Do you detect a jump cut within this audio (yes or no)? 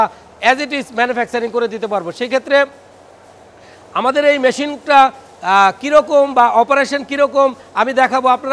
no